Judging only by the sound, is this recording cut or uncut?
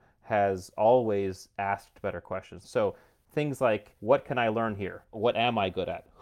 cut